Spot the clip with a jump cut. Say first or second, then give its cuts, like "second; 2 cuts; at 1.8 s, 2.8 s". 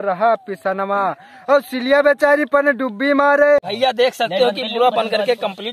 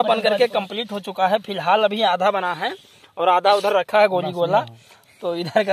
first; 1 cut; at 3.7 s